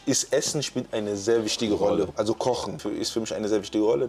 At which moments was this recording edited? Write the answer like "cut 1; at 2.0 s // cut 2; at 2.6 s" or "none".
cut 1; at 2.1 s // cut 2; at 2.7 s